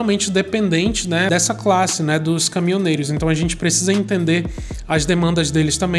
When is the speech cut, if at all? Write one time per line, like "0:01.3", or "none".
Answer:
none